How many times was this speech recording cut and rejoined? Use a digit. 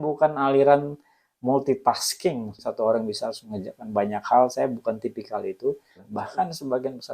2